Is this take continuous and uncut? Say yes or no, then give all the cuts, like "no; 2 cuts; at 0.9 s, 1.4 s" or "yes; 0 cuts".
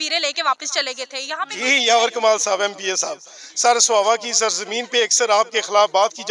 yes; 0 cuts